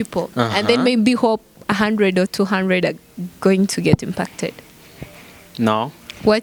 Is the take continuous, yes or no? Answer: yes